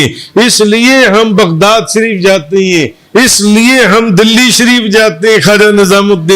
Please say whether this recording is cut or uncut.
uncut